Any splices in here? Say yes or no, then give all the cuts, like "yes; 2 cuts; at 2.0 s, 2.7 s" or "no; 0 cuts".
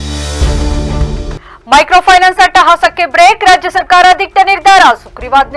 yes; 1 cut; at 1.2 s